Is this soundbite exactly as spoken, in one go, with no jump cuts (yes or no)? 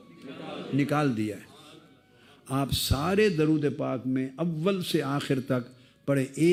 yes